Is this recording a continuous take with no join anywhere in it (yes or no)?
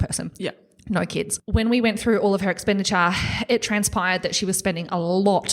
no